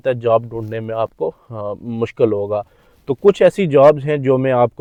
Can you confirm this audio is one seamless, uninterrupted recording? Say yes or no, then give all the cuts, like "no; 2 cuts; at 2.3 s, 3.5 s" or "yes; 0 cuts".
yes; 0 cuts